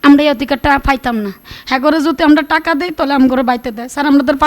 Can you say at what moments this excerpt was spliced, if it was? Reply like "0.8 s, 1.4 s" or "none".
1.5 s